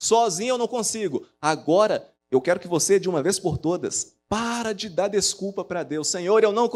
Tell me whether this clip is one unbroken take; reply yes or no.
no